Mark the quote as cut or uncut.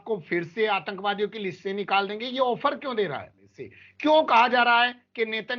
cut